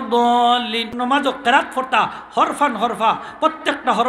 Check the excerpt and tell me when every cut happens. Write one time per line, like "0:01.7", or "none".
0:00.9